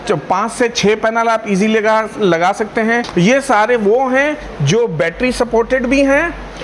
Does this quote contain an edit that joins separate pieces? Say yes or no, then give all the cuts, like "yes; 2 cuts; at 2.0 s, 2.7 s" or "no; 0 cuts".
yes; 1 cut; at 3.1 s